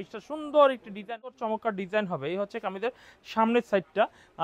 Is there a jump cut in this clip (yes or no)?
yes